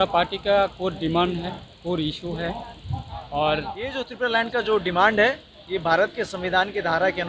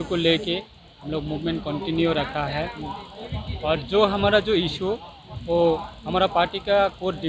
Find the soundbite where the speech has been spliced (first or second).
first